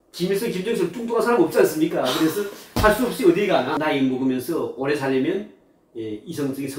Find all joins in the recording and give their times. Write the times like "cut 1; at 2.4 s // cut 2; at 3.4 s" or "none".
cut 1; at 3.8 s